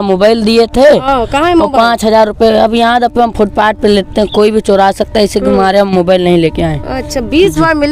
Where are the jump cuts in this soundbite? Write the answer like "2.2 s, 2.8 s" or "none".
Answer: none